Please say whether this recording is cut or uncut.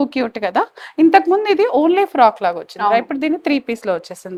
uncut